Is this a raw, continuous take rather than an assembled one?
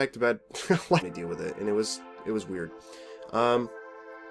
yes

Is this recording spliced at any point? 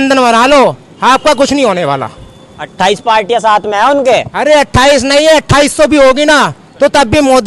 no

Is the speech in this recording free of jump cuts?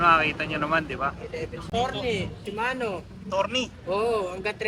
no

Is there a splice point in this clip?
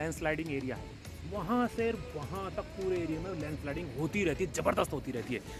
no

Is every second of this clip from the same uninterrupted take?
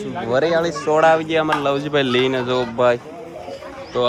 yes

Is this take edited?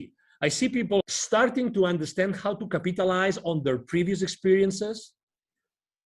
yes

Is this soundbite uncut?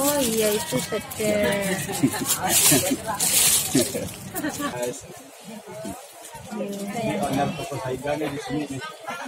no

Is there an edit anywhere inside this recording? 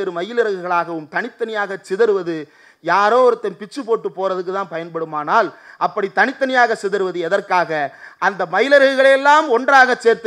no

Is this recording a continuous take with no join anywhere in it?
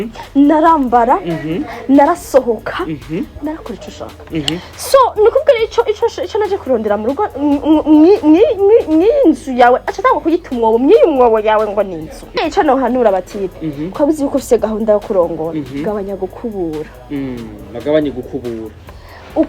no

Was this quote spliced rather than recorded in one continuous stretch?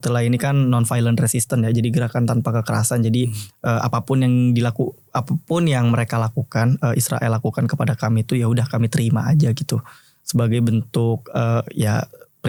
no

